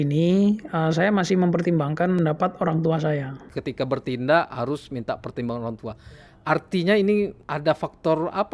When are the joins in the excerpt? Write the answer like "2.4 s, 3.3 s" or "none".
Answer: 2.2 s, 3.5 s, 7.4 s